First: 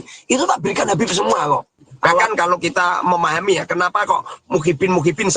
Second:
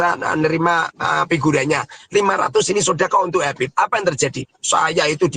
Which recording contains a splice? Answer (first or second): first